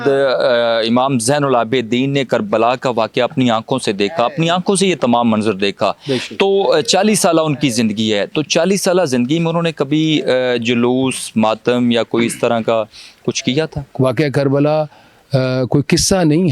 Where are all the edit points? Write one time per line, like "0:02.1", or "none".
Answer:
0:13.8